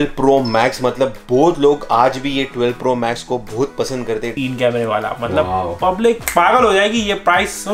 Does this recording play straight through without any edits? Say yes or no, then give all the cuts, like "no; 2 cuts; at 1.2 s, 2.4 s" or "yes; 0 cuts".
no; 1 cut; at 4.3 s